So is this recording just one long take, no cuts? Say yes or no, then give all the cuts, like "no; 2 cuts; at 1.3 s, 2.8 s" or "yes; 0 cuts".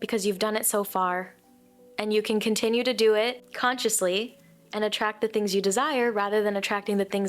no; 1 cut; at 3.5 s